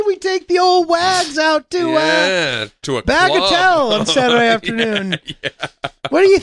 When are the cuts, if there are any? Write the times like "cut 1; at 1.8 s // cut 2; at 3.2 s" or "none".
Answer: none

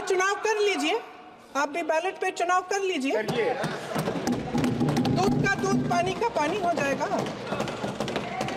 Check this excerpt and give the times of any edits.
none

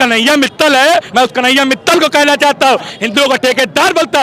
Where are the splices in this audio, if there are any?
cut 1; at 1.1 s // cut 2; at 2.9 s

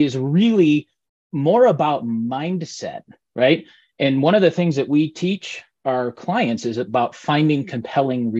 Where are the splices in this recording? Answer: none

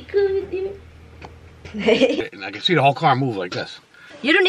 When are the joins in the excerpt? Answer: cut 1; at 2.2 s

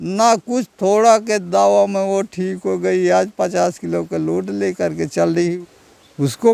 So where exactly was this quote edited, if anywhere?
cut 1; at 5.5 s

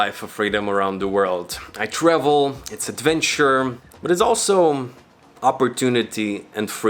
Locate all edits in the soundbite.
cut 1; at 3.9 s

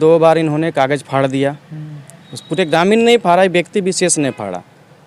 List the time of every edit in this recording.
none

